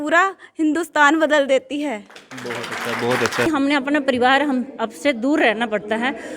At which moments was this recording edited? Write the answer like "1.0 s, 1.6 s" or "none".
3.5 s